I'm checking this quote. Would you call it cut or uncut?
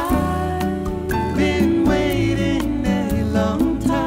uncut